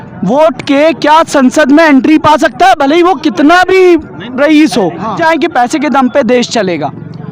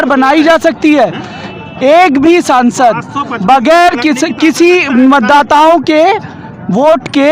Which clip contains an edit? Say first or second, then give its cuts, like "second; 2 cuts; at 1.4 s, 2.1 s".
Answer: first; 1 cut; at 5.2 s